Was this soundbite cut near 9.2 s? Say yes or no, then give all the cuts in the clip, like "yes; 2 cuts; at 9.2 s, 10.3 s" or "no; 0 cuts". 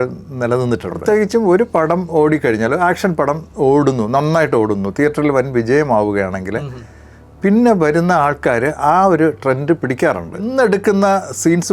no; 2 cuts; at 0.9 s, 10.5 s